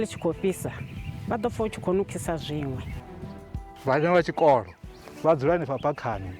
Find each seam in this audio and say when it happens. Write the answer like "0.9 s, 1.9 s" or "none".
3.3 s